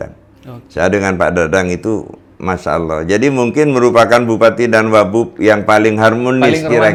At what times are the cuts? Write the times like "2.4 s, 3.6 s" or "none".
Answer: none